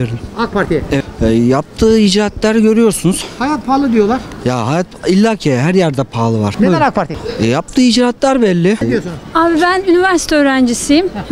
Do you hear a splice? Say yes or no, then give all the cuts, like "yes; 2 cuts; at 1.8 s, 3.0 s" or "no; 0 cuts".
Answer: yes; 4 cuts; at 1.1 s, 6.5 s, 7.2 s, 8.8 s